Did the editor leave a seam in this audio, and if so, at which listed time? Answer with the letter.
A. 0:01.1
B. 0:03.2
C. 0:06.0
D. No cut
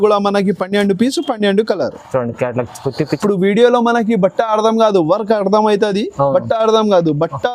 B